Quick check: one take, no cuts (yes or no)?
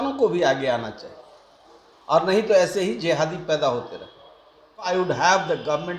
no